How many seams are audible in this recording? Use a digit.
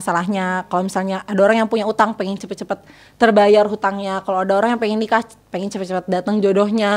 0